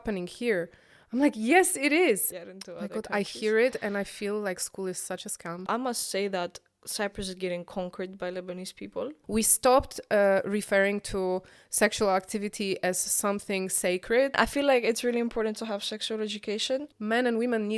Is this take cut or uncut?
cut